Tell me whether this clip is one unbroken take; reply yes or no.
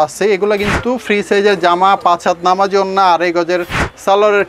yes